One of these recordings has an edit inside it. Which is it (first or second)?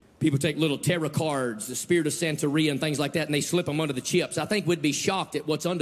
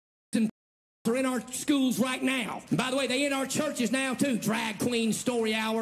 second